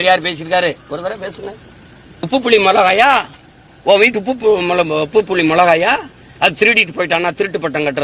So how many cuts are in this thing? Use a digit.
1